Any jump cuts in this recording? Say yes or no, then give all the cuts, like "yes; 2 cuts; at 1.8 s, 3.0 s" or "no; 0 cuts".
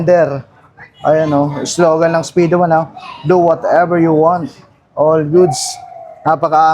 no; 0 cuts